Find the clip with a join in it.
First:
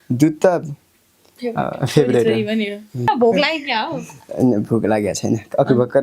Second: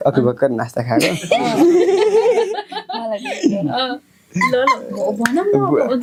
first; 1 cut; at 3.1 s

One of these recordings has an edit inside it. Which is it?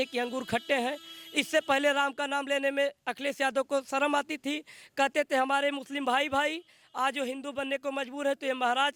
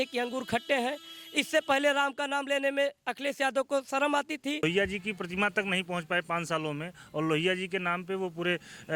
second; 1 cut; at 4.6 s

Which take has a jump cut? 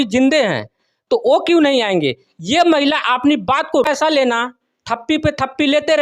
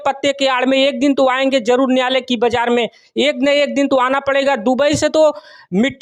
first; 1 cut; at 3.8 s

